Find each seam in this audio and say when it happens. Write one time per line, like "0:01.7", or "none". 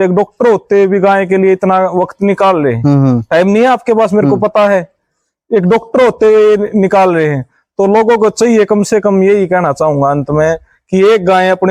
none